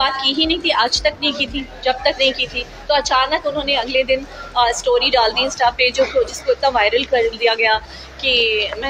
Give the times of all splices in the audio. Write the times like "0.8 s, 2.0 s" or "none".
none